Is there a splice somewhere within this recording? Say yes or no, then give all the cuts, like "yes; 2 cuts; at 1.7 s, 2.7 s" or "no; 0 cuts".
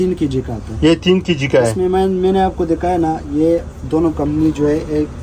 no; 0 cuts